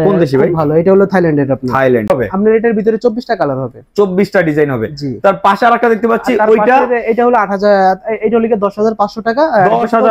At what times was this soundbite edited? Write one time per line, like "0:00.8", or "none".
0:02.1